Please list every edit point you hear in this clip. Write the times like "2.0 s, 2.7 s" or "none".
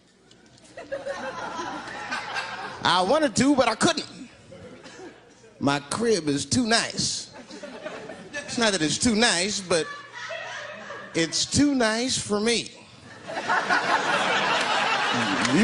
8.5 s